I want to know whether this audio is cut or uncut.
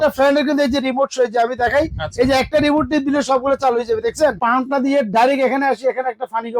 cut